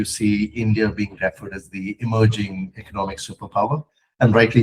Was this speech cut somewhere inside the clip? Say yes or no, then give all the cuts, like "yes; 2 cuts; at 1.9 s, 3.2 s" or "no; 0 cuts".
no; 0 cuts